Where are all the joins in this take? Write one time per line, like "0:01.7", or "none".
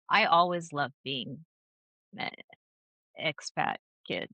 none